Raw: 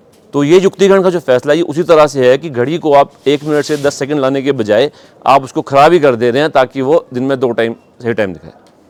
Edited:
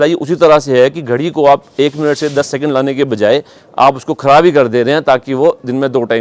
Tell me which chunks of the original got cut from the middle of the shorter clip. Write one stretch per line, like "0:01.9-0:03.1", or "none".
none